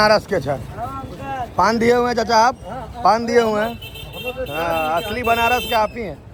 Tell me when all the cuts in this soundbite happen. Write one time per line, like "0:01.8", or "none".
none